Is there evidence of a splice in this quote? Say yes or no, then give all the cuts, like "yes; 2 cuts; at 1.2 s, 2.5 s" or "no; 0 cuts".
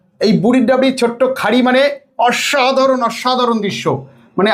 no; 0 cuts